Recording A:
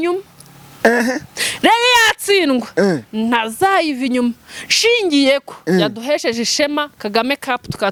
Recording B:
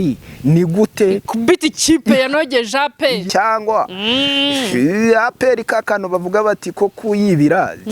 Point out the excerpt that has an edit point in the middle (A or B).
B